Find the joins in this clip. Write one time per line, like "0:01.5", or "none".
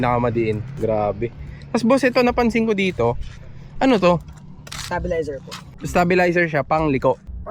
none